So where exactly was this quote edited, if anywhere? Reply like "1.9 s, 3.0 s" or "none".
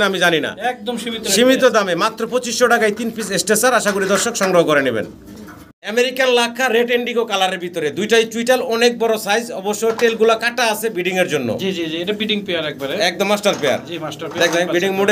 none